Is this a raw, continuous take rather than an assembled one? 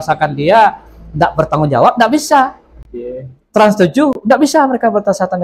yes; 0 cuts

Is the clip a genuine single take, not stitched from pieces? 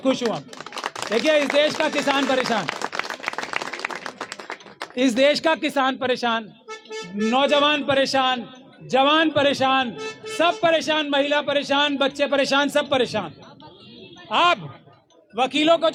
yes; 0 cuts

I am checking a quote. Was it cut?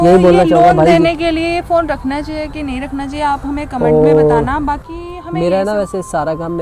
no; 0 cuts

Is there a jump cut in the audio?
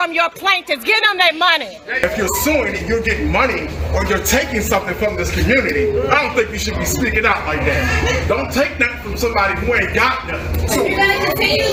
no; 0 cuts

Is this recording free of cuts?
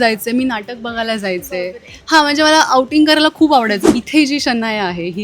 no; 1 cut; at 3.8 s

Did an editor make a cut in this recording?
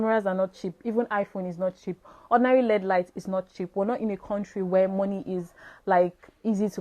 no; 0 cuts

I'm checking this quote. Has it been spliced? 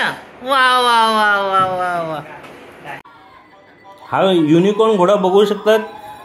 yes; 1 cut; at 3.1 s

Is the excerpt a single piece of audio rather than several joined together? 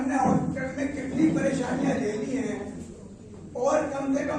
yes; 0 cuts

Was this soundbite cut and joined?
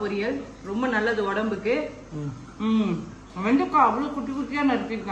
no; 0 cuts

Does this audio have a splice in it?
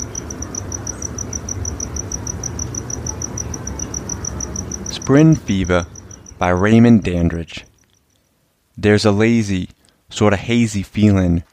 yes; 1 cut; at 5.0 s

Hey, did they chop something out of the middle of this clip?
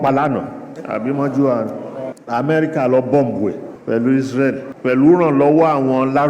yes; 3 cuts; at 2.1 s, 3.7 s, 4.7 s

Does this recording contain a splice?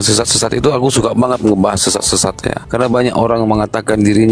yes; 1 cut; at 2.6 s

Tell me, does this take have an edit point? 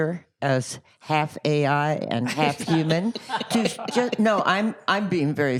no; 0 cuts

